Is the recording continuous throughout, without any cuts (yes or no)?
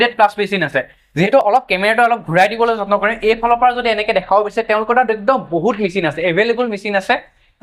yes